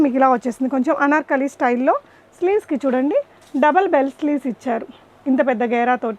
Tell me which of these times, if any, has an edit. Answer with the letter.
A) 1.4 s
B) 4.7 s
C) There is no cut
C